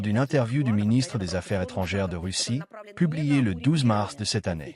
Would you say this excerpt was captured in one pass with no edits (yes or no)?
yes